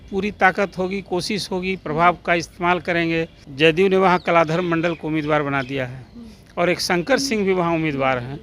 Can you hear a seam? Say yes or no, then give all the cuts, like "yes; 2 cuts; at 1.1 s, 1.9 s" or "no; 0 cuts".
yes; 1 cut; at 3.4 s